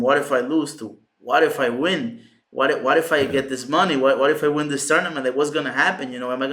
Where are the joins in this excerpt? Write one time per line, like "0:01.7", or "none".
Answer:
none